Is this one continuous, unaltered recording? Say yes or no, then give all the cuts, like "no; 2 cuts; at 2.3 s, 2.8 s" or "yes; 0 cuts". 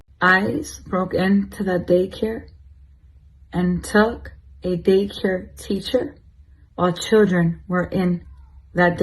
no; 1 cut; at 3.0 s